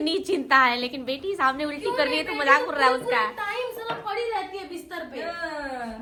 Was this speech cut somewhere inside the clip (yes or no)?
no